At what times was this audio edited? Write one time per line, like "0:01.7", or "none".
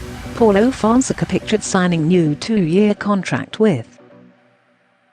none